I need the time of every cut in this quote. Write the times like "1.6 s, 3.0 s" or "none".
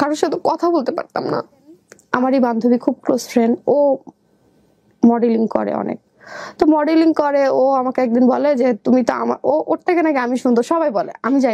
2.0 s